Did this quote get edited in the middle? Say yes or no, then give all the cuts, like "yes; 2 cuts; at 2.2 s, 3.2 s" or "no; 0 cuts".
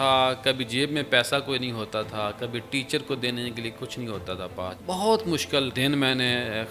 yes; 2 cuts; at 4.8 s, 5.7 s